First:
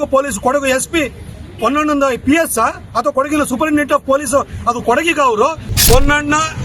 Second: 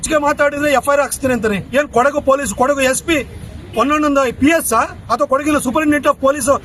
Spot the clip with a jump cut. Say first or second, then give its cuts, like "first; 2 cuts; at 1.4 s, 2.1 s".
first; 1 cut; at 5.7 s